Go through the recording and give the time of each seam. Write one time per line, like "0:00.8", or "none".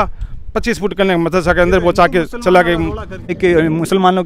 0:03.4

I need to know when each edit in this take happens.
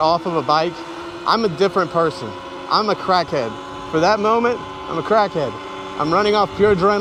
none

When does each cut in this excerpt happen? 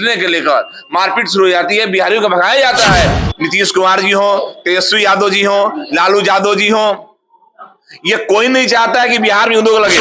0:03.2

